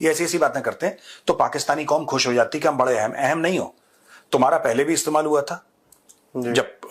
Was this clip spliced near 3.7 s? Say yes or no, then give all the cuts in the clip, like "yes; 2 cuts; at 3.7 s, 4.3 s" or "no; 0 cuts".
no; 0 cuts